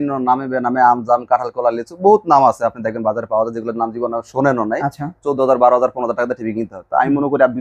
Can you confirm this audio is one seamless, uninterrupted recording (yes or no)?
yes